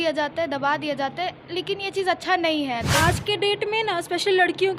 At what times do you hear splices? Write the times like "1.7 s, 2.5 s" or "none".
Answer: 2.9 s